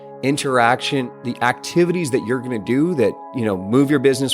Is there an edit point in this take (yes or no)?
yes